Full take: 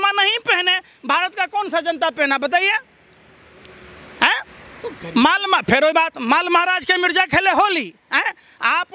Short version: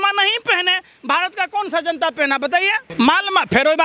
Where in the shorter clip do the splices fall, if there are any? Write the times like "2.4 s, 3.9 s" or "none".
2.8 s

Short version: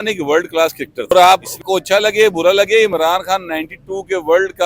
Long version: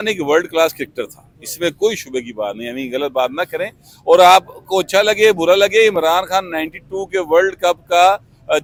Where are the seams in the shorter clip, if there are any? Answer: 1.1 s

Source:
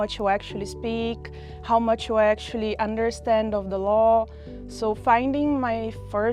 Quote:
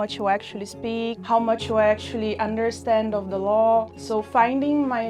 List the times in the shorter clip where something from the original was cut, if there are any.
1.2 s, 4.0 s

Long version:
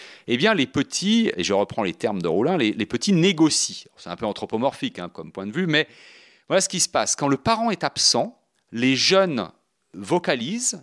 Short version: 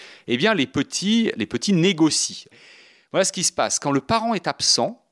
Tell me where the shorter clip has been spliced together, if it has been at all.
1.4 s, 2.6 s

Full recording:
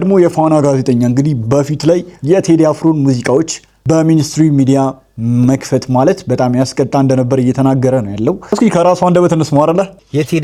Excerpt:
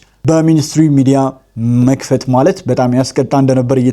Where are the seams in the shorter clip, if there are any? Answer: none

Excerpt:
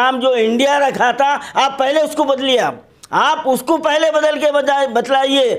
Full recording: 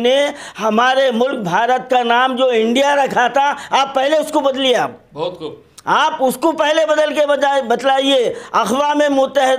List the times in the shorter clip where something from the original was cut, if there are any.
2.9 s

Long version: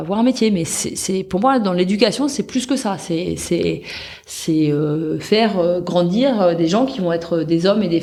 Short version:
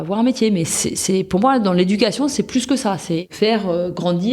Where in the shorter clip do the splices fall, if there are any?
3.3 s

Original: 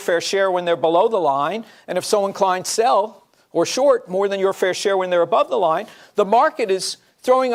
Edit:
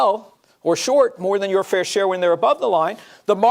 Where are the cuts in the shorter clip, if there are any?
none

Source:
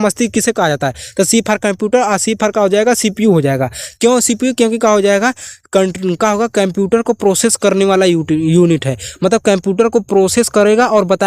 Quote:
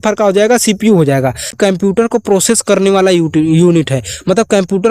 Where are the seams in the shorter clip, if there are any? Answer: 1.6 s

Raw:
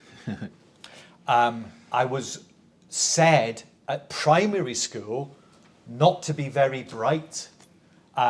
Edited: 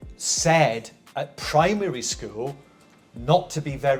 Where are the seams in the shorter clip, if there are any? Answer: none

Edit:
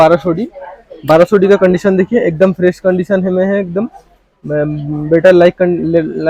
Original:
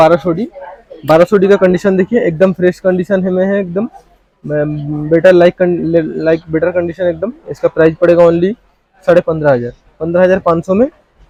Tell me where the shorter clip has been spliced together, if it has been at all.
none

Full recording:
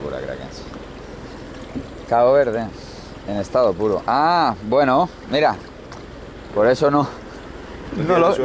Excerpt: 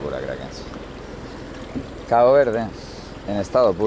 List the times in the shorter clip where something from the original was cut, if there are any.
none

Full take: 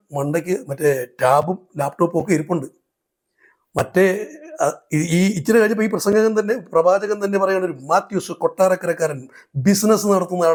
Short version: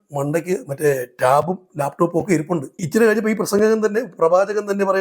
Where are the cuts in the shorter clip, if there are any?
2.9 s

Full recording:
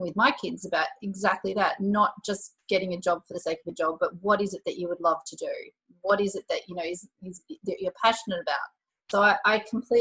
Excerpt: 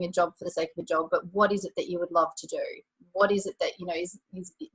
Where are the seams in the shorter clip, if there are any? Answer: none

